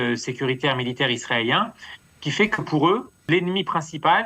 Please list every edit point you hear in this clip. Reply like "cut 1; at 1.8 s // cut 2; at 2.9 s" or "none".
cut 1; at 3.2 s